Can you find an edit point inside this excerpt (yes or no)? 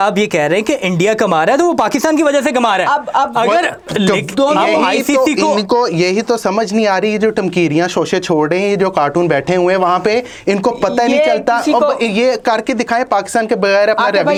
no